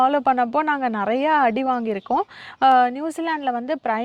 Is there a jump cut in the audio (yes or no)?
no